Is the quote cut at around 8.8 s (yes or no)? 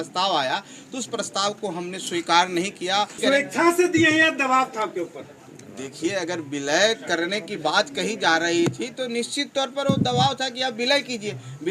no